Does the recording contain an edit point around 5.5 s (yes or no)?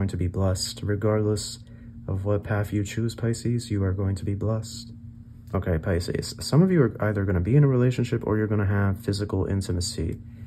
yes